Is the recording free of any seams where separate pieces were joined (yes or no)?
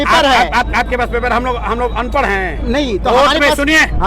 yes